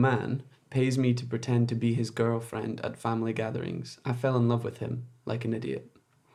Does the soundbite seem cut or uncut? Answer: uncut